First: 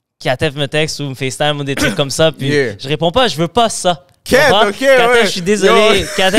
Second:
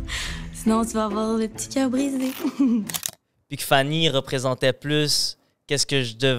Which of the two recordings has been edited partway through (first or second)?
second